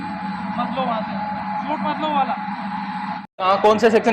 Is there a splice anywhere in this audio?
no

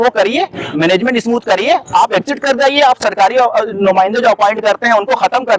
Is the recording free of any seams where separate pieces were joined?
yes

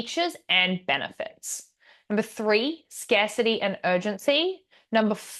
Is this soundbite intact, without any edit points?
yes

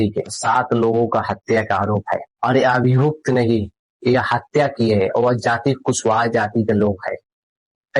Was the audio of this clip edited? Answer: yes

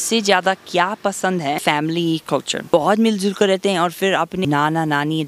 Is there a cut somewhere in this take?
yes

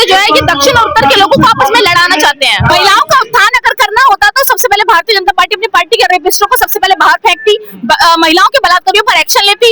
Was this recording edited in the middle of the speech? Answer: yes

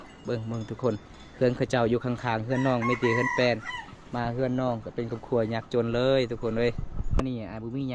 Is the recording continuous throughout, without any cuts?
yes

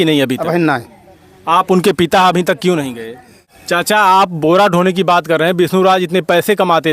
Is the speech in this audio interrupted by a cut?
yes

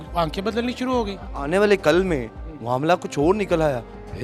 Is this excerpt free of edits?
no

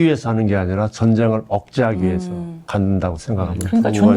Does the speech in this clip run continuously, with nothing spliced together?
no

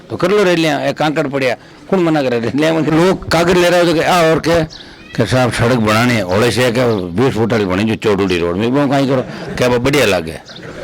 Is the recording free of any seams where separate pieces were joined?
no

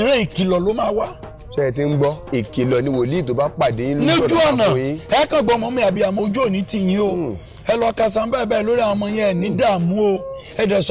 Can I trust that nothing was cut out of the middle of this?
yes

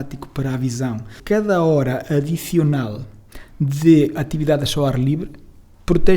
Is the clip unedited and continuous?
no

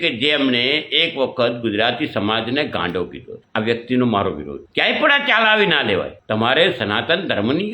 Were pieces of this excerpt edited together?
no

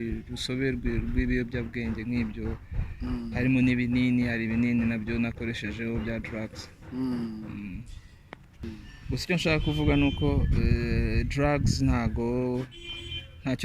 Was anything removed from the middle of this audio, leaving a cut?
yes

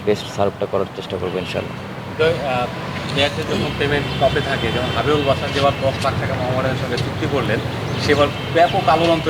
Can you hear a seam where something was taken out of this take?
no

